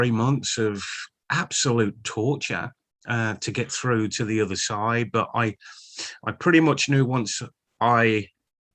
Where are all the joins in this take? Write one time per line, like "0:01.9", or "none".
none